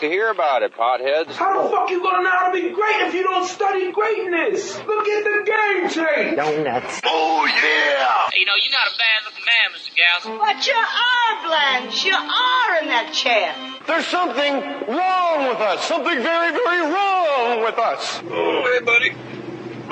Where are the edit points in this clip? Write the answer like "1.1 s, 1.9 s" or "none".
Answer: none